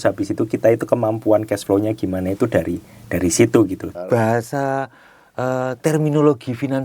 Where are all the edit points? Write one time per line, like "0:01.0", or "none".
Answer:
0:03.9